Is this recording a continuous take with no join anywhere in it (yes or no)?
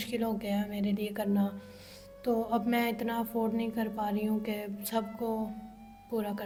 yes